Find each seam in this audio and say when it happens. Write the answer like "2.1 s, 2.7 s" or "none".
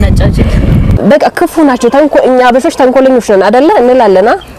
1.0 s